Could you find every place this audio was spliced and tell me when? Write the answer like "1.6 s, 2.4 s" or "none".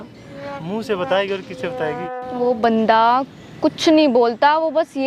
2.1 s